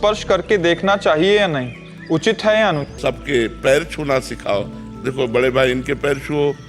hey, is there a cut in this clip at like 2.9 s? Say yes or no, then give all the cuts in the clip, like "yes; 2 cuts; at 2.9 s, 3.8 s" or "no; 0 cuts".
yes; 1 cut; at 2.9 s